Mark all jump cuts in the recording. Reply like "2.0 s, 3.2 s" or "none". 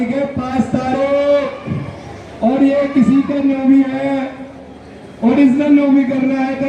none

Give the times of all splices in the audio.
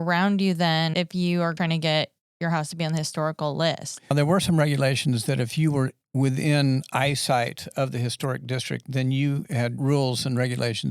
1.5 s, 4.1 s, 9.8 s

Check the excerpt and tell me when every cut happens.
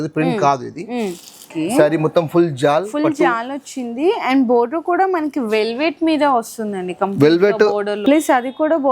1.5 s, 7.9 s

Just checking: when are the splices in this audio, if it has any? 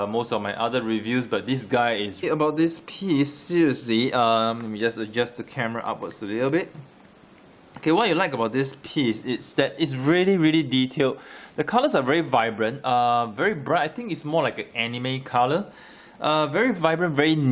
none

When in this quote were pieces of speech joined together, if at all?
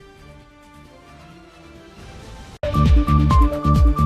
2.6 s

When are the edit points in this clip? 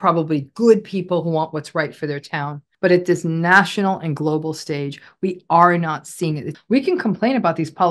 2.6 s, 6.5 s

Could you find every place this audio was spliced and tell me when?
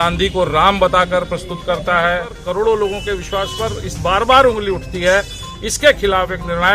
2.4 s

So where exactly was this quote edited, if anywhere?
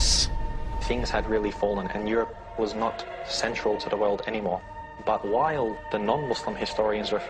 none

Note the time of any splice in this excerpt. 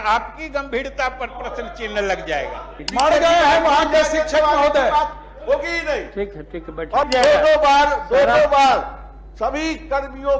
2.8 s, 7.1 s

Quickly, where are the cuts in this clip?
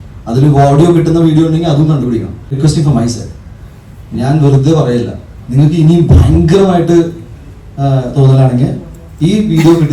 2.5 s

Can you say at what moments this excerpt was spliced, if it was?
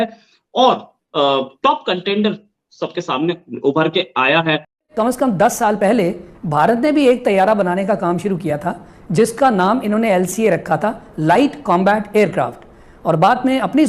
4.9 s

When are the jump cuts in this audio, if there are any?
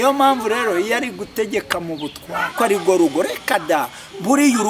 2.5 s

